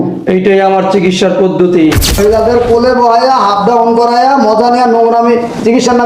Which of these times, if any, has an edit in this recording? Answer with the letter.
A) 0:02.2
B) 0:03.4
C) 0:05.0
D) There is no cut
A